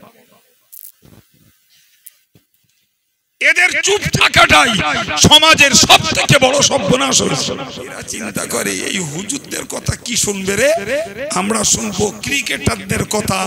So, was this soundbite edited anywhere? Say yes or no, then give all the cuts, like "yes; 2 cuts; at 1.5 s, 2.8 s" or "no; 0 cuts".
yes; 1 cut; at 8.1 s